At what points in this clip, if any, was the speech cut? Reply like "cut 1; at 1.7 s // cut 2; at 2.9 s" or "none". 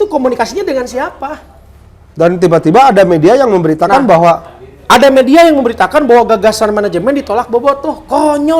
none

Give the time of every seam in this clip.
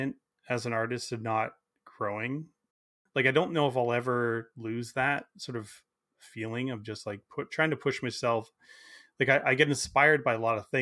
cut 1; at 2.9 s

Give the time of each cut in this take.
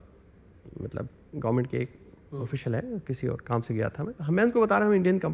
cut 1; at 4.2 s

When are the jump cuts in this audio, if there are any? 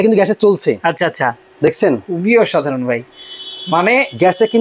none

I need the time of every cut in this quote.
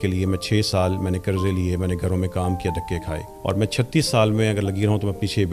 cut 1; at 3.3 s

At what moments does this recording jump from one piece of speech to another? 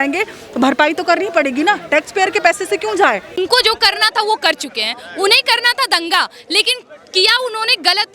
cut 1; at 3.3 s

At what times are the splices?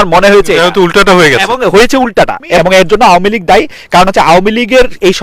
cut 1; at 2.4 s

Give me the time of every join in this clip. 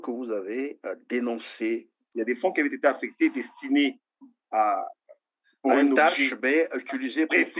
cut 1; at 2.1 s

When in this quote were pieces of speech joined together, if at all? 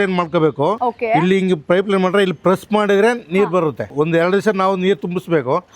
none

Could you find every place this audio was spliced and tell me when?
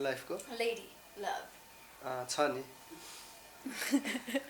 none

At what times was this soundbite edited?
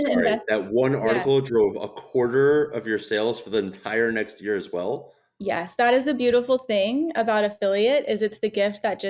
none

